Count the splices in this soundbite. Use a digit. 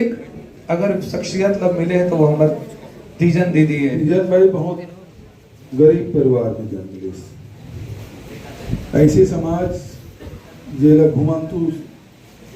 1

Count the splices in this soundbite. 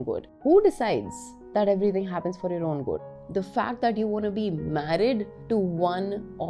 1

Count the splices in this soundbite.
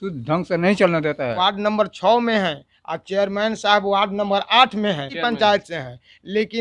2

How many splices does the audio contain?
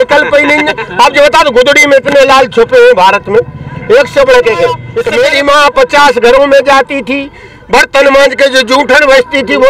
1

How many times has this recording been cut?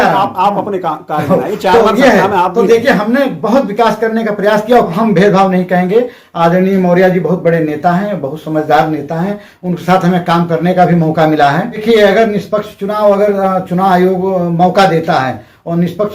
2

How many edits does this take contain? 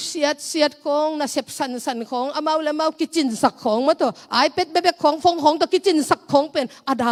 0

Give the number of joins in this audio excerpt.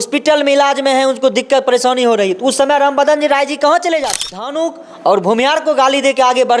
1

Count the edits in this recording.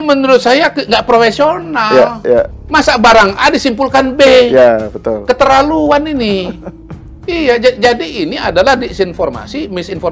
1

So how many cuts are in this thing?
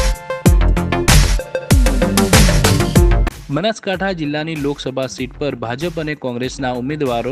1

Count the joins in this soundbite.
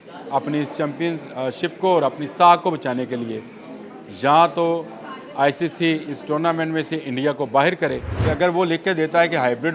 1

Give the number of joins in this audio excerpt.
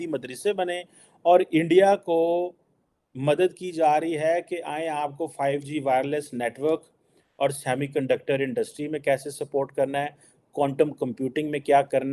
0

